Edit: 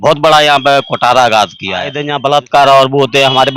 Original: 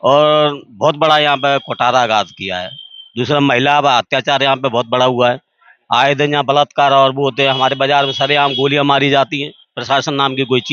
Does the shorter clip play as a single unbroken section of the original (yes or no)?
no